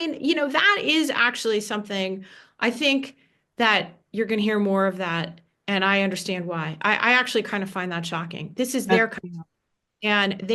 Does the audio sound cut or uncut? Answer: uncut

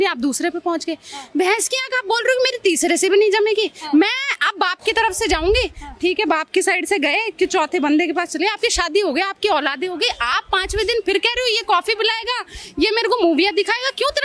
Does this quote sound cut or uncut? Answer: uncut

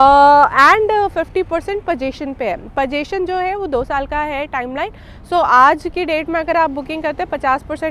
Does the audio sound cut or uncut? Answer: uncut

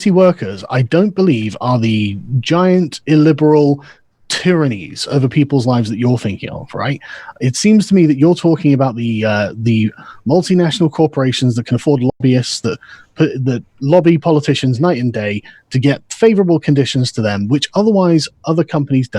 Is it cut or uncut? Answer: uncut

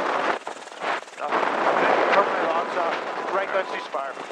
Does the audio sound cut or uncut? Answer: cut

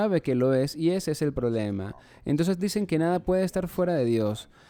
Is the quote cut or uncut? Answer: uncut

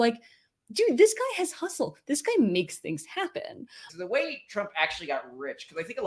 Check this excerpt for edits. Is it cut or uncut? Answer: cut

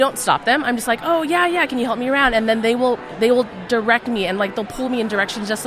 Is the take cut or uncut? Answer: uncut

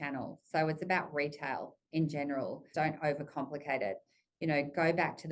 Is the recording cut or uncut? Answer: cut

